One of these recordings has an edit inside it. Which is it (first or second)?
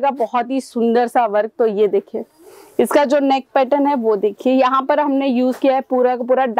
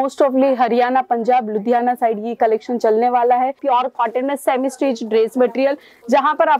second